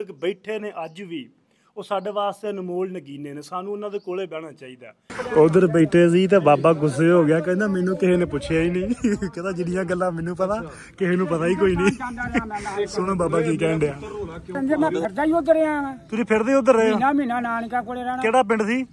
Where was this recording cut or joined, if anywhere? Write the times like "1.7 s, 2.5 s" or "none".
5.3 s, 14.6 s